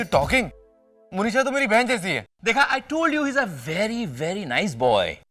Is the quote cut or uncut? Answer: cut